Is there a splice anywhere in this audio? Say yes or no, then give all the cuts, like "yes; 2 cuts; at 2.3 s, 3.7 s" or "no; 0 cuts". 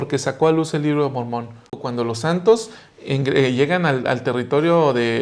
yes; 1 cut; at 1.8 s